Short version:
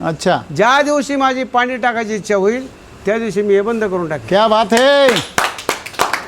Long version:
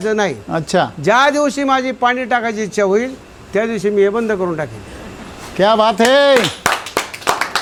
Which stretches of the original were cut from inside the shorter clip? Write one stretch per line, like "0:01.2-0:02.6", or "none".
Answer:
0:04.7-0:05.5